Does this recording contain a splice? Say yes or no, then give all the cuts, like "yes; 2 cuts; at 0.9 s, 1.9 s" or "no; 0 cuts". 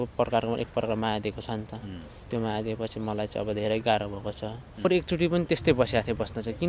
yes; 1 cut; at 4.8 s